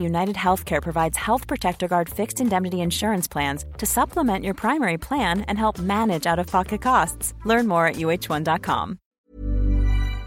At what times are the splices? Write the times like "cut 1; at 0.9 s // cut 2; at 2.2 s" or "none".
cut 1; at 9.1 s